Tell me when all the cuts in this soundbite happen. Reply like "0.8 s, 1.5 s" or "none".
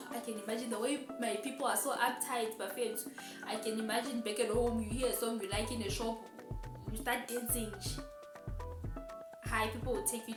none